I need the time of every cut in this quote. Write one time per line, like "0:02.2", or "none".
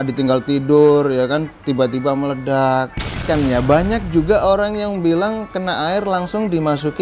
0:03.2